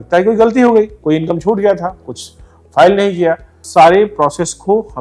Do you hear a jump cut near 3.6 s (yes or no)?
yes